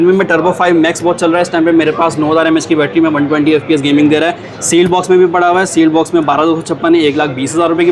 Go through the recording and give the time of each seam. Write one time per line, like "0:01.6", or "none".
none